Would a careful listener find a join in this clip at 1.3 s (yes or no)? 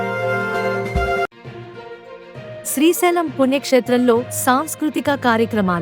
yes